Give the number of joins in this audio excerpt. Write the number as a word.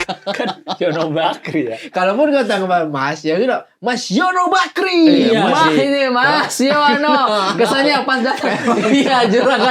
zero